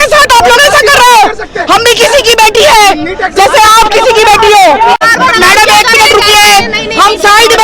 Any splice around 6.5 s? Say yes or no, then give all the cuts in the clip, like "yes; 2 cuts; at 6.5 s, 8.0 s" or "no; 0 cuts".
no; 1 cut; at 5.0 s